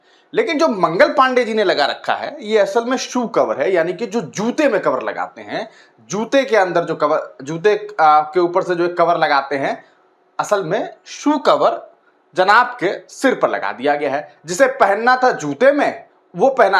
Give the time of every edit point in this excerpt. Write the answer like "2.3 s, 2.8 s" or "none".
none